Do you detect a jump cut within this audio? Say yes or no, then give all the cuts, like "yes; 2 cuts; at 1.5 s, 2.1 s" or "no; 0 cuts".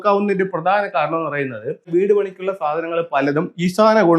yes; 1 cut; at 1.9 s